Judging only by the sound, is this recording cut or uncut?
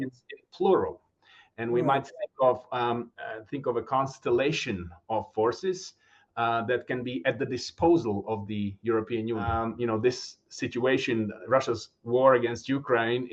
cut